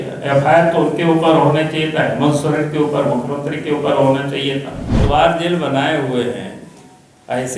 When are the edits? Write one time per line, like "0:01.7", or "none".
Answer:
0:05.0